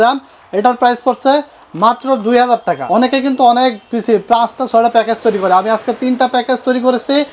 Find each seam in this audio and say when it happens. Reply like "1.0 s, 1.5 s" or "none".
2.8 s